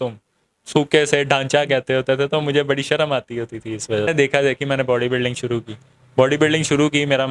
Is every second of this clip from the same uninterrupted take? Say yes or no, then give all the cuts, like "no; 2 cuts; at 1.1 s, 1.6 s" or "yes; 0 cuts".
no; 1 cut; at 4.1 s